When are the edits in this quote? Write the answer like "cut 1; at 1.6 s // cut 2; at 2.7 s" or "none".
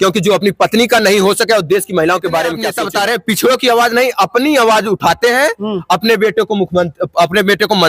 cut 1; at 2.8 s